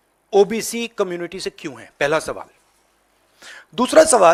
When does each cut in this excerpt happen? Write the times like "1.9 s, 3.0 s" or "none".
none